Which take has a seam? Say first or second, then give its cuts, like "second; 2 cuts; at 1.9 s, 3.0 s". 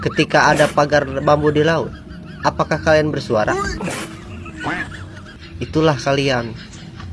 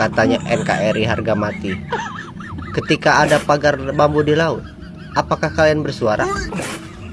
first; 1 cut; at 5.3 s